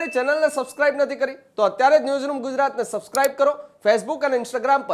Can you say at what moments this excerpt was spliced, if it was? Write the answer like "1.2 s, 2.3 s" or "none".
none